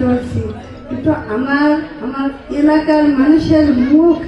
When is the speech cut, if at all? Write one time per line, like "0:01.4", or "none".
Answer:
none